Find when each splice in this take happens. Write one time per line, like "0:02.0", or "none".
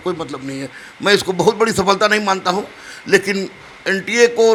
none